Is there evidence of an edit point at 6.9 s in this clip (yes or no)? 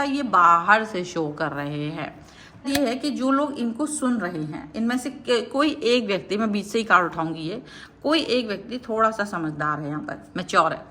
no